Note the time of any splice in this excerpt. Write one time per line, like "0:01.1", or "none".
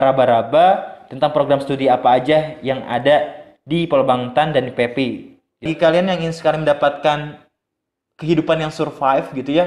0:05.6